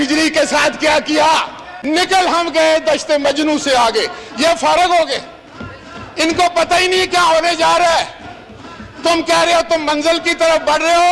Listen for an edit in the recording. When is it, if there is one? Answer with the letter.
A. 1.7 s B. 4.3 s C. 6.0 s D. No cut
A